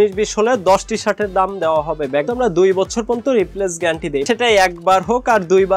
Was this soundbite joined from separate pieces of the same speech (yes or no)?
yes